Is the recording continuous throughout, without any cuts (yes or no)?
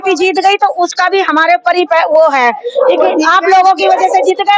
yes